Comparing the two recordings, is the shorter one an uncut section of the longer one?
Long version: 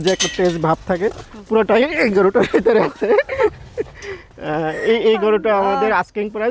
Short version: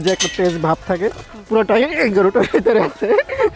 yes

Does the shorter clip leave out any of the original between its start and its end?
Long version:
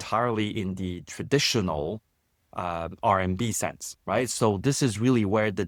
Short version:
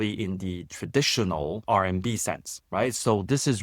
yes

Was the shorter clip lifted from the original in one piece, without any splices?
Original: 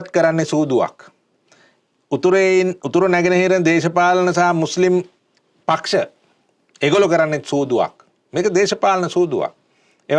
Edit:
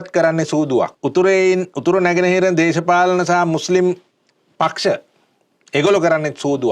no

